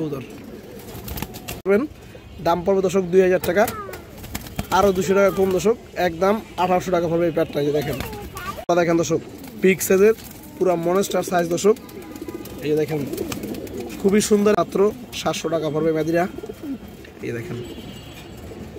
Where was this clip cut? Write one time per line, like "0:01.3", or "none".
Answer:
0:01.7
0:08.7
0:14.7